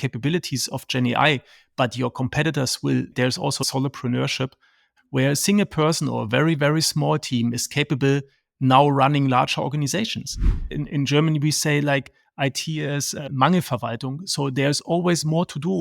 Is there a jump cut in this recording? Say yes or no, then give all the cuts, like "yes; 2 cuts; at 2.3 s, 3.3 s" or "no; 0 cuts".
yes; 2 cuts; at 3.5 s, 10.7 s